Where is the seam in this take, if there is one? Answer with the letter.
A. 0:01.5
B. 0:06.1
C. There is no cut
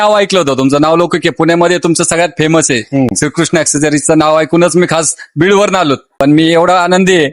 B